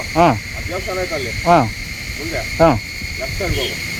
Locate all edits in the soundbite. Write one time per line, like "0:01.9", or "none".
none

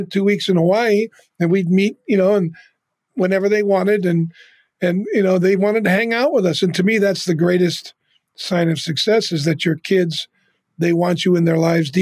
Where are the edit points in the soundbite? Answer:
none

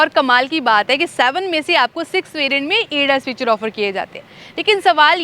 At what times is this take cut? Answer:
none

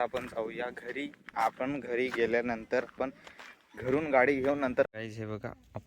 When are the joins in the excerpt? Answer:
0:04.8

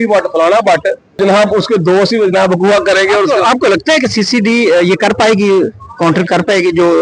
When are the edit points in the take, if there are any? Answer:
0:01.2

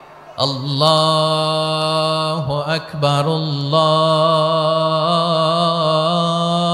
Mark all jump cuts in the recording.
none

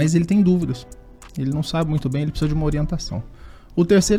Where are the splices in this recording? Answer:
none

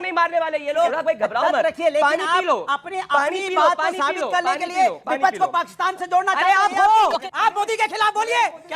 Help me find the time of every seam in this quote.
0:01.0
0:07.2

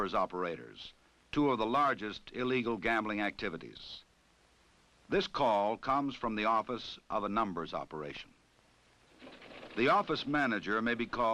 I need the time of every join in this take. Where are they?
0:02.5

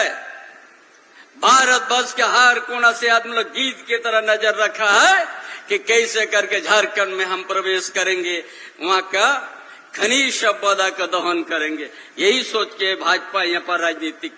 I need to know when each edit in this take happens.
none

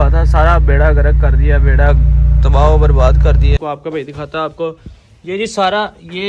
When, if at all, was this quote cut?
0:03.6

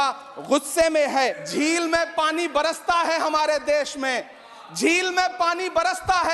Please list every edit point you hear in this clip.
0:01.2

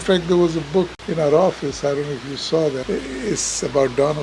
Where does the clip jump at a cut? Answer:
0:01.0
0:02.8

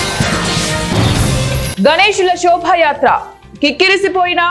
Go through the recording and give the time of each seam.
0:01.7

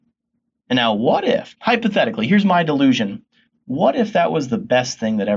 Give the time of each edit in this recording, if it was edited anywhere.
0:01.5

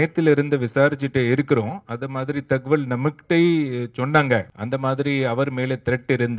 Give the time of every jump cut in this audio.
0:04.5

